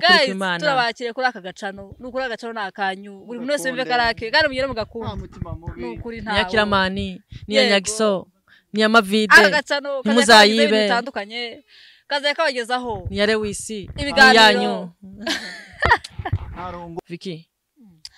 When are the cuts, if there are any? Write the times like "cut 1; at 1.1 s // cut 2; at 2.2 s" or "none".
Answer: cut 1; at 16.9 s